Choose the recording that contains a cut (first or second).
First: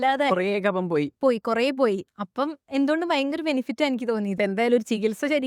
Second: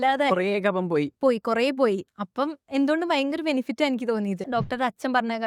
second